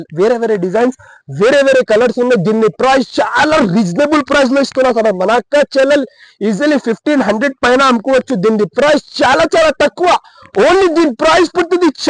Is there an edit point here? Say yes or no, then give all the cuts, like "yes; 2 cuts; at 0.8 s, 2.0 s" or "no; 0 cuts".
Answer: no; 0 cuts